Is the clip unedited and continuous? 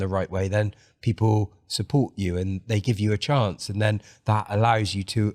yes; 0 cuts

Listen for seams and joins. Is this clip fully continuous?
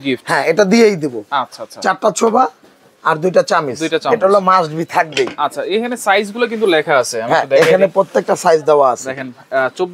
yes; 0 cuts

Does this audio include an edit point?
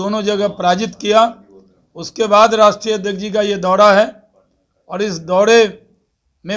no; 0 cuts

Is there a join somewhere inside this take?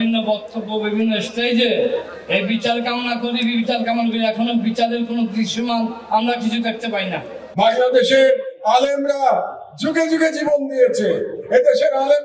yes; 1 cut; at 7.4 s

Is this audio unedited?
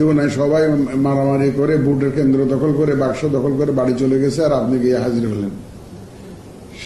yes; 0 cuts

